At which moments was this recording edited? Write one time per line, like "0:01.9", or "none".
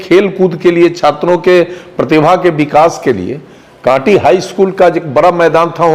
none